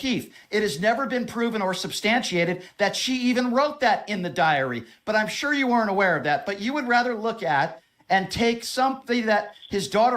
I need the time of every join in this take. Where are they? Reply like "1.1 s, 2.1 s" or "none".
4.9 s